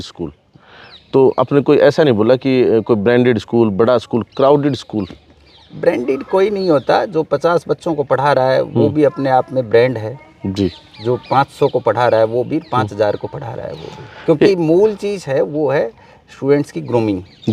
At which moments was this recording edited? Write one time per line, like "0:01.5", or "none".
none